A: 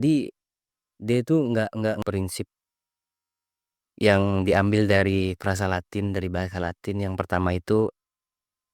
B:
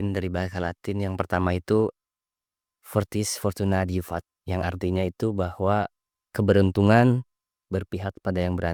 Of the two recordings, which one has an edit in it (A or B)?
A